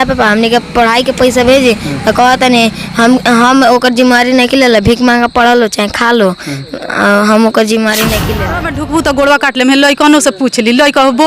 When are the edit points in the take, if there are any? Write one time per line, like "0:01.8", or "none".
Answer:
0:08.4